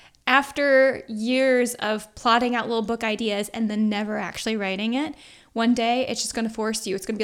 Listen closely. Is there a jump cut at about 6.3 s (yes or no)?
no